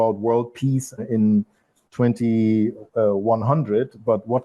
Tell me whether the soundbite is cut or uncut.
uncut